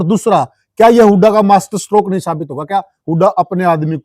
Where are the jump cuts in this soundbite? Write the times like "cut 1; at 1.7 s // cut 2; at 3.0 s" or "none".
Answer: none